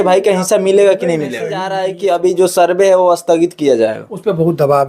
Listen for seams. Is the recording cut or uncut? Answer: cut